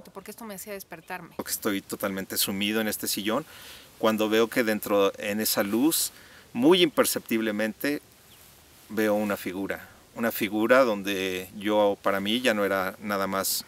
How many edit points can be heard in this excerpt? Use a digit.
1